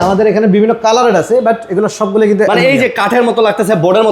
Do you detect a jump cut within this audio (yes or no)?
no